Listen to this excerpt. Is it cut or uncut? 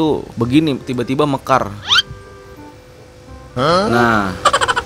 uncut